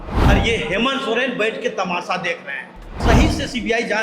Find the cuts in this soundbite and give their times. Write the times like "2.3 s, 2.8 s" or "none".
3.0 s

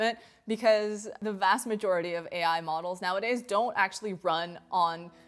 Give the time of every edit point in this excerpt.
1.2 s

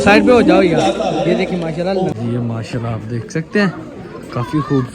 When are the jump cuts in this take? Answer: 2.1 s

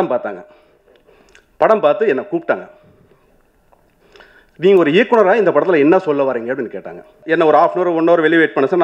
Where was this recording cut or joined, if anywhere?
7.1 s

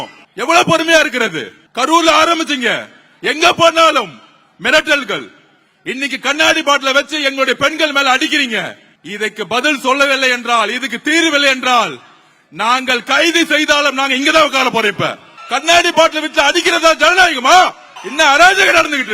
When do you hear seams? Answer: 15.3 s, 17.9 s

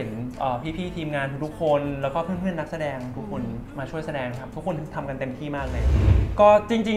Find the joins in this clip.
6.0 s

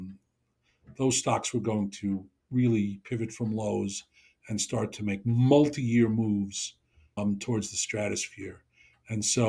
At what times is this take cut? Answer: 7.2 s

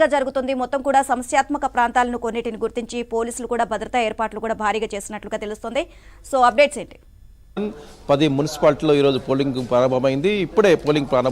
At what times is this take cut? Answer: 7.6 s

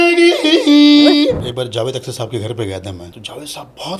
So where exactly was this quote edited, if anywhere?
1.5 s, 3.1 s

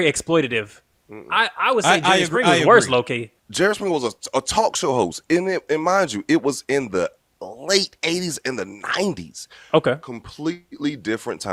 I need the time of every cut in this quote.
3.4 s

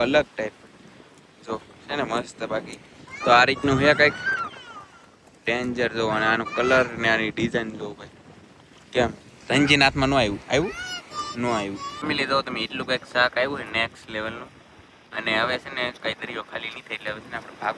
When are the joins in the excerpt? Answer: none

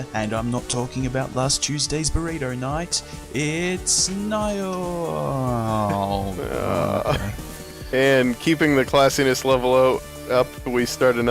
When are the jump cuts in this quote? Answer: 2.8 s

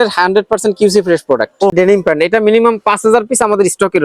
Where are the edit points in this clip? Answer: 1.7 s

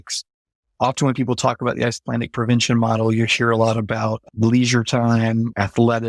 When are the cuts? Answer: none

